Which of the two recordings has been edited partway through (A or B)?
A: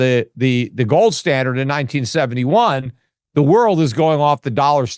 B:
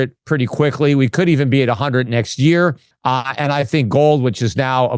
B